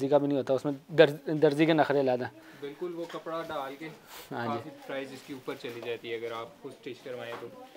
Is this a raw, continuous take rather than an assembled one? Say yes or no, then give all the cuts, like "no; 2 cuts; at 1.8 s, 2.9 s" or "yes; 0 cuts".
yes; 0 cuts